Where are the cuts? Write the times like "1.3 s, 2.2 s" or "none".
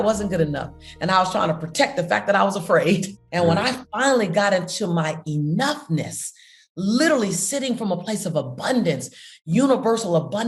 3.2 s